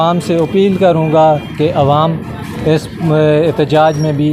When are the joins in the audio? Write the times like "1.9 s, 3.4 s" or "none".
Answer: none